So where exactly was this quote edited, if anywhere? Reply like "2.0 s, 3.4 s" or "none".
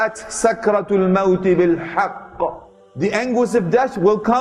none